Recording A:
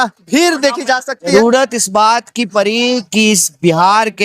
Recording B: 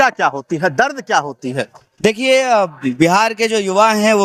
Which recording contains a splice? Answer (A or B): A